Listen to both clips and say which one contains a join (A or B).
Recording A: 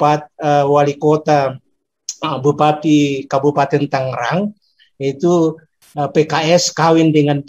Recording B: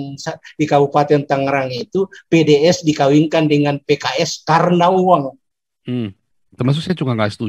B